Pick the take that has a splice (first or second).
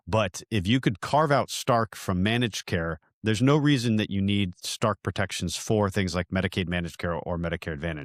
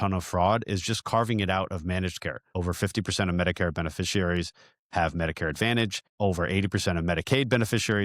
second